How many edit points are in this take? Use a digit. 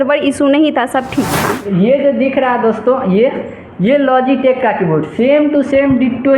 1